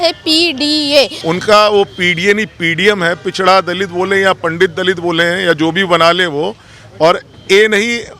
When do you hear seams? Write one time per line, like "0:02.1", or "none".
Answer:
0:01.2